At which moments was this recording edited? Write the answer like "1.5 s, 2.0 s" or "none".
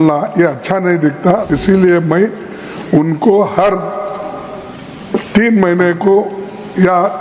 1.5 s